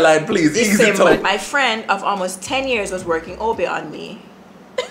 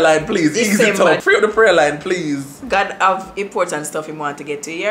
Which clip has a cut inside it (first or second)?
first